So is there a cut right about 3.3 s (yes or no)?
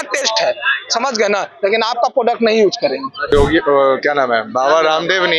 yes